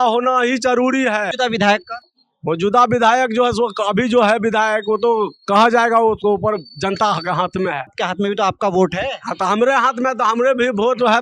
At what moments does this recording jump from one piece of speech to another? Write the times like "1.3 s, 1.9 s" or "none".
none